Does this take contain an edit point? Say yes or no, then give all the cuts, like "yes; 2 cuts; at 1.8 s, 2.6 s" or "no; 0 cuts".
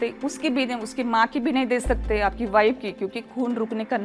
no; 0 cuts